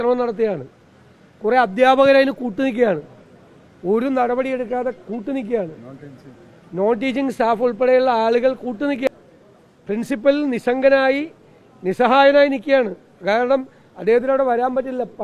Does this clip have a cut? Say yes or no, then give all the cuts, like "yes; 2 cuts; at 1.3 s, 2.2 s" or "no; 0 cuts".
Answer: yes; 1 cut; at 9.1 s